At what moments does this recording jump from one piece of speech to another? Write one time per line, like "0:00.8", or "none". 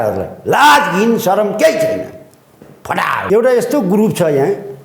0:03.2